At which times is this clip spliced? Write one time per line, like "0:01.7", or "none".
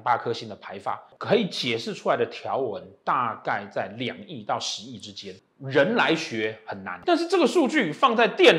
0:01.1
0:05.4
0:06.9

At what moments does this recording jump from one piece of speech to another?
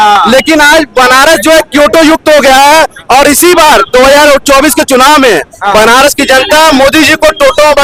none

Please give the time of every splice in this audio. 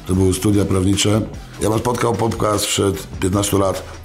0:01.4
0:03.1

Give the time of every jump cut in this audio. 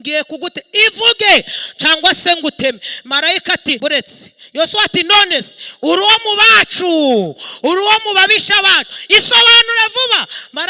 0:03.8

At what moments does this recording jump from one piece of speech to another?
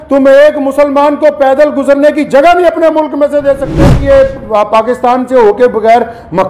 0:03.9

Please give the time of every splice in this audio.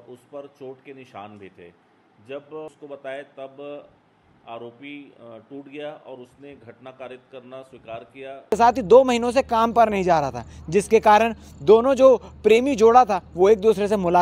0:02.7
0:08.5

